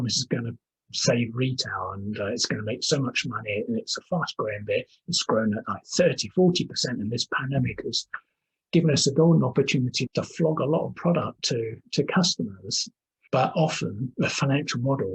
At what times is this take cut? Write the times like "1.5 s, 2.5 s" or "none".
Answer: none